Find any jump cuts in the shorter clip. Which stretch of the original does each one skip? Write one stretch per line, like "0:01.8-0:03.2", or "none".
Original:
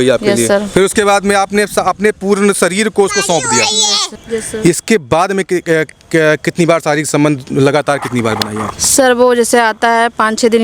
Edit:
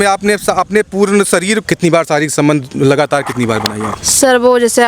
0:02.9-0:06.4